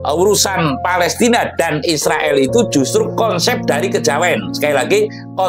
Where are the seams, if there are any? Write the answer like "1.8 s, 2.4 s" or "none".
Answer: none